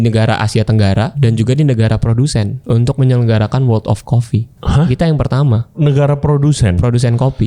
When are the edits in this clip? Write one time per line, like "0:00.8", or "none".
0:01.1
0:02.6
0:04.5
0:05.7